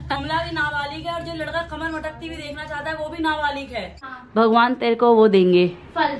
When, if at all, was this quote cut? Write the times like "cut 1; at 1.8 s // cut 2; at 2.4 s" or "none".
cut 1; at 4.1 s